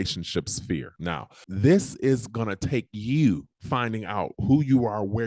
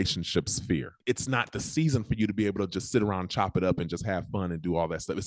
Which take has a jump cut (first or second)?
second